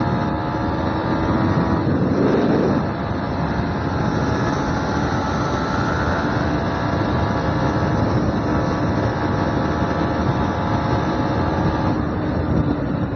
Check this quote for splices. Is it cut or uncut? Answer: uncut